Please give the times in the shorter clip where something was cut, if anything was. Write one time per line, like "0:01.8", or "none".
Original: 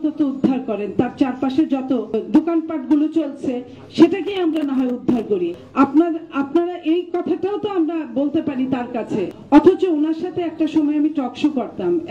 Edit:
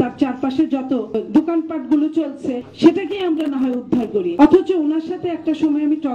0:02.6
0:04.3